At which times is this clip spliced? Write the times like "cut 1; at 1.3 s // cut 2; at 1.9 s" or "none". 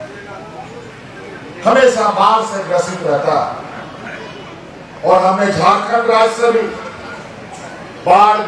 none